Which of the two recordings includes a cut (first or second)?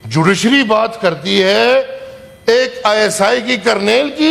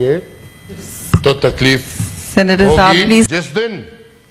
second